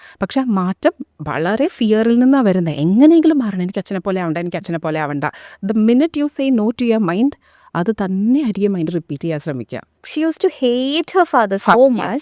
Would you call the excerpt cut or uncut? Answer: cut